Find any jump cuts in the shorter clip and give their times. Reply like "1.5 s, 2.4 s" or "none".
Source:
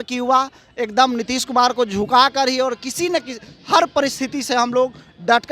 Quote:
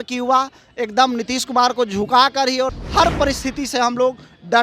2.8 s